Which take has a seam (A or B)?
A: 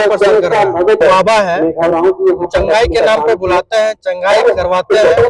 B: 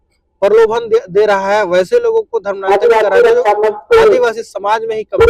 A